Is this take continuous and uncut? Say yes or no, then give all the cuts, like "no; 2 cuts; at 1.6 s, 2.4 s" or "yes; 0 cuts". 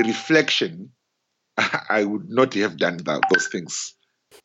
yes; 0 cuts